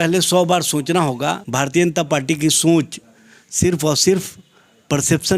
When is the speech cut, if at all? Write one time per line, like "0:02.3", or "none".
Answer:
0:01.4